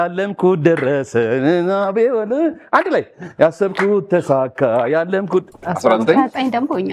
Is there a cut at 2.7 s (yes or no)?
no